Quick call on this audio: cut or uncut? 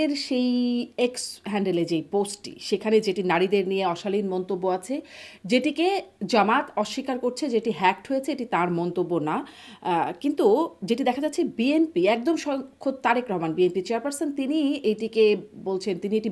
uncut